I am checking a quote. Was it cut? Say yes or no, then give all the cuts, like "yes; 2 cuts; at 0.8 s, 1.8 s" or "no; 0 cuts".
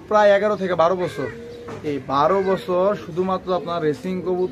no; 0 cuts